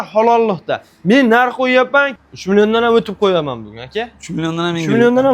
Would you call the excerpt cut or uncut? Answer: cut